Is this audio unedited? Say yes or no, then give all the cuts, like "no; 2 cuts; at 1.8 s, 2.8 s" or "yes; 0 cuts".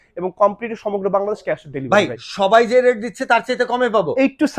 yes; 0 cuts